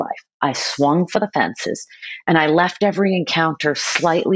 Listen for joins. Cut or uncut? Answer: uncut